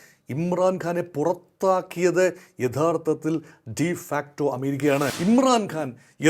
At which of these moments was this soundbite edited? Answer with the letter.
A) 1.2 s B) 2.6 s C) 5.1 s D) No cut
C